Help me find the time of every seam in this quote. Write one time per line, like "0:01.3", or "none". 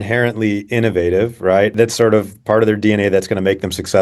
0:01.7

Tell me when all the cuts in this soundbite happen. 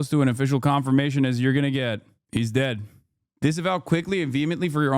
0:03.2

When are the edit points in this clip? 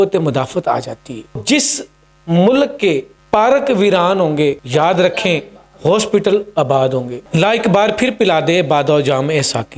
0:01.4
0:03.1
0:04.6
0:07.2

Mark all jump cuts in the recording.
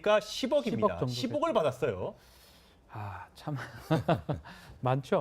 0:03.2

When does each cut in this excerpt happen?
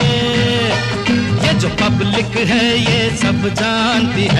none

